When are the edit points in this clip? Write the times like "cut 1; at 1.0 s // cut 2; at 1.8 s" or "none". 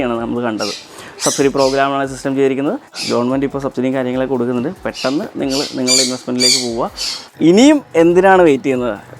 cut 1; at 2.9 s // cut 2; at 7.3 s

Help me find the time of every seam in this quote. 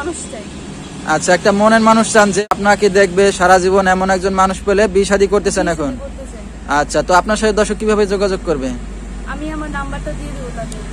cut 1; at 2.5 s

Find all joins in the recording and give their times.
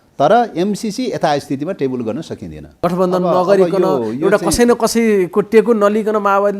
cut 1; at 2.6 s

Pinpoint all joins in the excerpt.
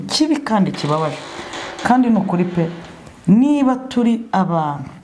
none

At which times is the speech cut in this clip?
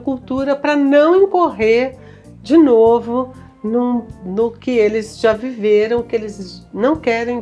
none

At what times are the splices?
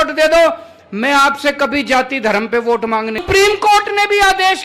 cut 1; at 3.2 s

